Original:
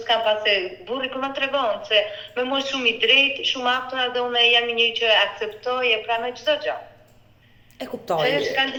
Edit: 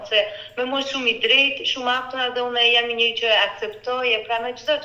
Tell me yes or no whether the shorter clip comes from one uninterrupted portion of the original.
yes